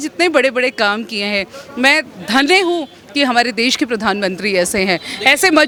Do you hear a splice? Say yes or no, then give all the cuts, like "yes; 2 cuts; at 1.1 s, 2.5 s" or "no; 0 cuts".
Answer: no; 0 cuts